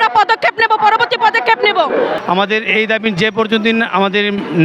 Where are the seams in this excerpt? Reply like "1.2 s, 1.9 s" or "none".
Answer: 2.2 s

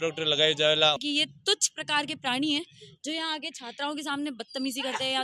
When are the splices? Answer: 1.0 s

